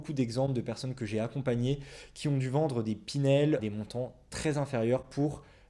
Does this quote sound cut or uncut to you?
uncut